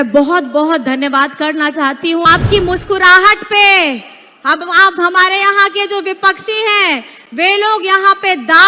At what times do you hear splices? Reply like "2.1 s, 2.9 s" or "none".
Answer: 2.2 s